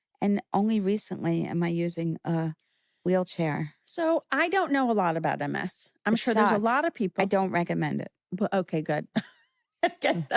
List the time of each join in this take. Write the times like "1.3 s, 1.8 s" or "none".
none